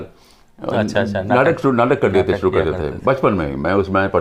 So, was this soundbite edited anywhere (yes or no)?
no